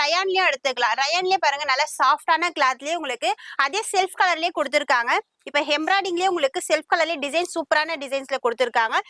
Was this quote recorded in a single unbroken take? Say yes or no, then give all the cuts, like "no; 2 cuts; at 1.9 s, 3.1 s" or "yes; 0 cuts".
yes; 0 cuts